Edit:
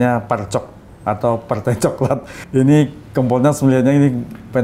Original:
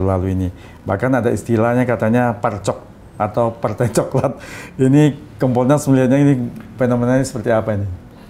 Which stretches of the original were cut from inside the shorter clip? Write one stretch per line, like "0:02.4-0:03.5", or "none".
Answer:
0:04.5-0:04.6